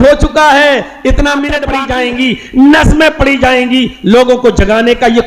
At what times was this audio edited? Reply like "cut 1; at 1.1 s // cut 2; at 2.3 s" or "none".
cut 1; at 1.6 s